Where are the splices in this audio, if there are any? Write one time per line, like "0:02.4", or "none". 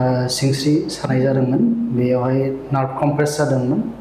none